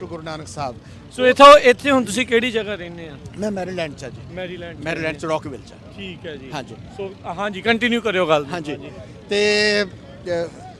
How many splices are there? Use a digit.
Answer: 0